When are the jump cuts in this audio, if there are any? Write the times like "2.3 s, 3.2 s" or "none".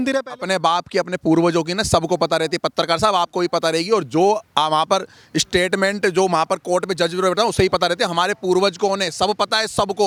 none

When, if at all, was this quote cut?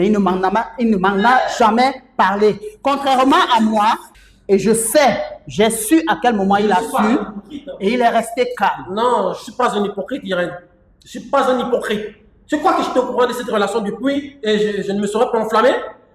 4.1 s

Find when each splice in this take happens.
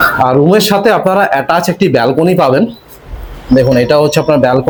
none

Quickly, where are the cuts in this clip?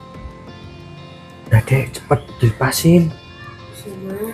1.5 s

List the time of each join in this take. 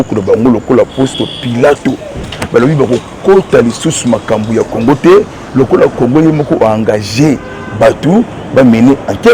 none

